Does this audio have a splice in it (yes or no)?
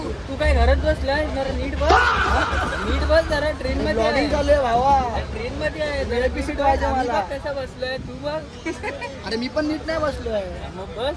no